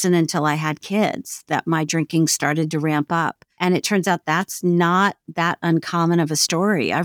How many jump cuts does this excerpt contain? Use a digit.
1